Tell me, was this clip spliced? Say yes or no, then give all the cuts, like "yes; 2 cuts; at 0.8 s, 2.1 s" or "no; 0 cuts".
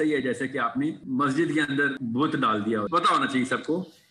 yes; 3 cuts; at 1.0 s, 2.0 s, 2.9 s